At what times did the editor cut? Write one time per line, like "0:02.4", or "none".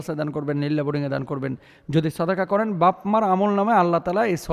none